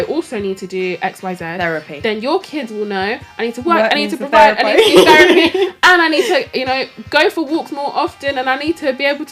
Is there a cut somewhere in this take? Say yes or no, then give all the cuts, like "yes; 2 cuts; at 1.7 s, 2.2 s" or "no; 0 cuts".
no; 0 cuts